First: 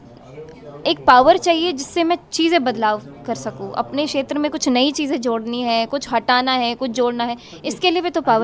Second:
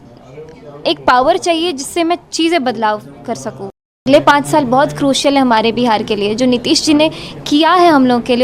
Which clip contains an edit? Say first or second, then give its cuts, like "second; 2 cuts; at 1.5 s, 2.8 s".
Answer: second; 1 cut; at 4.0 s